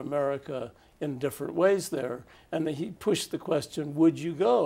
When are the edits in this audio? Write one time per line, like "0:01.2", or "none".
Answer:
0:02.9